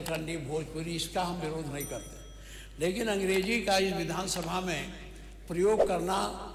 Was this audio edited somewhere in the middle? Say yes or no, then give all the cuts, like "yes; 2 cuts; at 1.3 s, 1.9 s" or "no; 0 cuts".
no; 0 cuts